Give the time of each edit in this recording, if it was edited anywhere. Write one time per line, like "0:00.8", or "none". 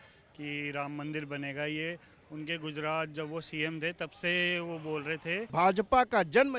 0:05.5